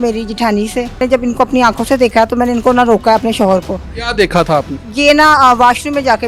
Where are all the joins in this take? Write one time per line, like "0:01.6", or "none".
0:01.0
0:04.8